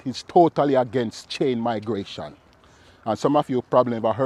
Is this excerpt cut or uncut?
uncut